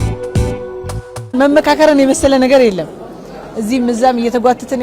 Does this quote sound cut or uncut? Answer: cut